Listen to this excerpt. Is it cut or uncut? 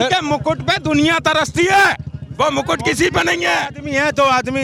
uncut